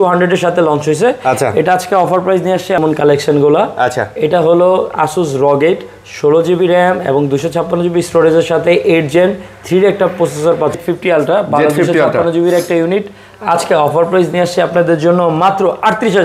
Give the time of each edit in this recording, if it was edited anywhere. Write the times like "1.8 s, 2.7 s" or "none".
2.8 s, 10.8 s